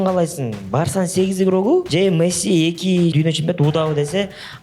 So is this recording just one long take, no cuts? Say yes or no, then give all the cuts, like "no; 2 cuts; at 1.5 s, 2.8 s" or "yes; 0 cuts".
no; 2 cuts; at 1.9 s, 3.1 s